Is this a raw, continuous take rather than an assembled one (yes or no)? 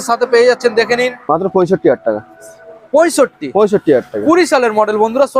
no